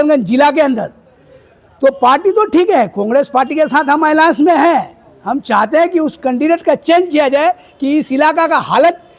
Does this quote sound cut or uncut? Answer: uncut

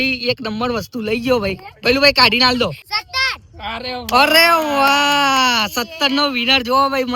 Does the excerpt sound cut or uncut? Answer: cut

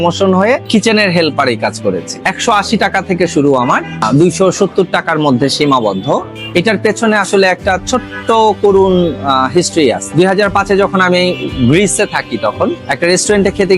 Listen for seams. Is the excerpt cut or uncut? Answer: cut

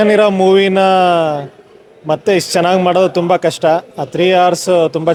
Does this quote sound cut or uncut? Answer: uncut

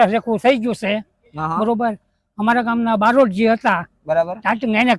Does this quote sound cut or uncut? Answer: uncut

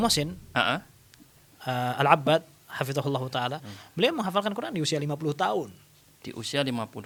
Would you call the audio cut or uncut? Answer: uncut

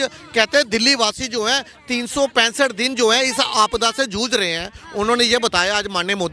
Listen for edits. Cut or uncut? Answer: uncut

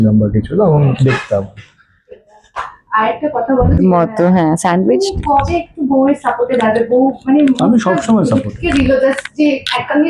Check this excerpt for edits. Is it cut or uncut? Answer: cut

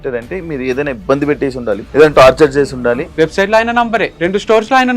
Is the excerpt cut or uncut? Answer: cut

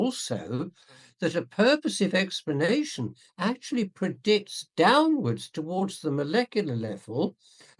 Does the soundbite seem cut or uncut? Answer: uncut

